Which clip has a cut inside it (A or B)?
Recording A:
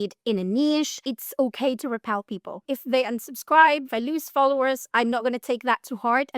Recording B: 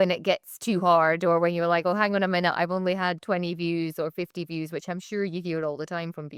A